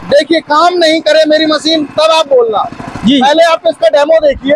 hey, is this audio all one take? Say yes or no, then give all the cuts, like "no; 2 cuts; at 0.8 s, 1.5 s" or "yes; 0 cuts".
yes; 0 cuts